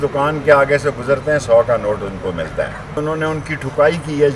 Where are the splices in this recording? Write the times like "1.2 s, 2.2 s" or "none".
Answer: 3.0 s